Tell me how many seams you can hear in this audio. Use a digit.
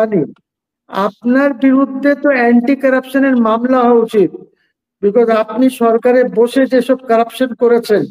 0